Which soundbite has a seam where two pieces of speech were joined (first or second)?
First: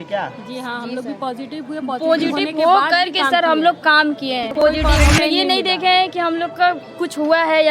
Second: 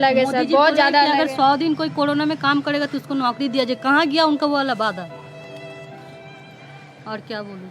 first